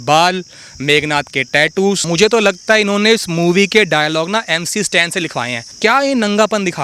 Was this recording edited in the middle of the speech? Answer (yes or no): yes